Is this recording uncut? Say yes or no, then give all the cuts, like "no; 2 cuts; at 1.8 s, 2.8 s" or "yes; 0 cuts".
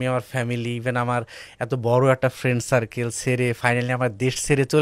yes; 0 cuts